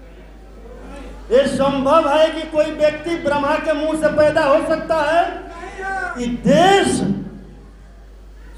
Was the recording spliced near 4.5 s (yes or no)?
no